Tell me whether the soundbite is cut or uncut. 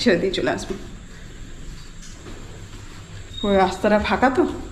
uncut